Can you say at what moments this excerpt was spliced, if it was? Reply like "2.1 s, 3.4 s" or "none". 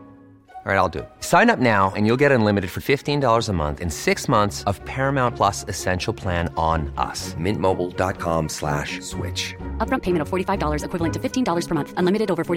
none